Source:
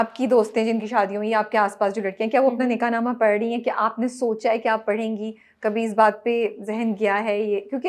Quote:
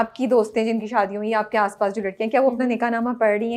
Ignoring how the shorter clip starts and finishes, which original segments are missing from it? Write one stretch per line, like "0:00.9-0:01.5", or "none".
none